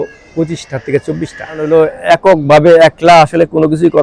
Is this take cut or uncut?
cut